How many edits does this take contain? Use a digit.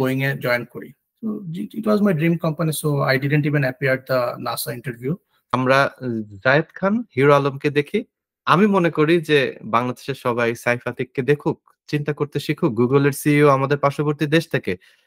1